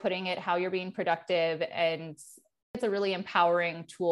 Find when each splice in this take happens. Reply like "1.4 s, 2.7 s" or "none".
2.8 s